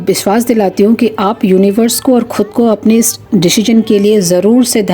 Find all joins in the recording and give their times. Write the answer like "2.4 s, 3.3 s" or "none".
none